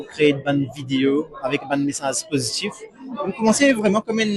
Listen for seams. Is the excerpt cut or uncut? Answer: uncut